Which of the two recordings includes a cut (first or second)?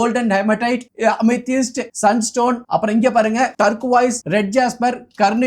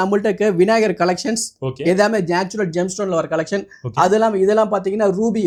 first